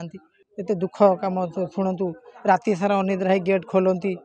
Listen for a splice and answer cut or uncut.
uncut